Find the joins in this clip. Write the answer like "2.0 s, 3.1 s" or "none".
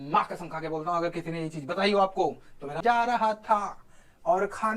2.6 s